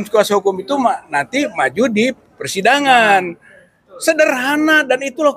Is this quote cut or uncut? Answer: uncut